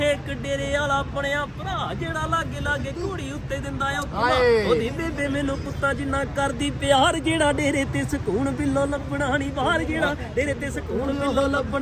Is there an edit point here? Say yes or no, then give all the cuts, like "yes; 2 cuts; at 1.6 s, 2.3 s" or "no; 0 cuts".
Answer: no; 0 cuts